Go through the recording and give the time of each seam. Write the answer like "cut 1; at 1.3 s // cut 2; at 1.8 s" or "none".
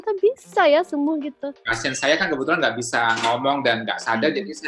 cut 1; at 1.7 s